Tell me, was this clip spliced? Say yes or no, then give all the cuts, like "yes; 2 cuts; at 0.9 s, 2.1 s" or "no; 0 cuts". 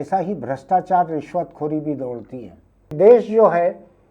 yes; 1 cut; at 2.9 s